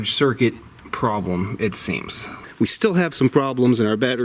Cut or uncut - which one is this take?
cut